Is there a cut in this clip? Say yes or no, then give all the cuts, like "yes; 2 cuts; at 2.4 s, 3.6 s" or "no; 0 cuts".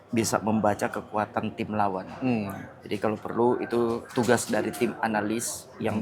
no; 0 cuts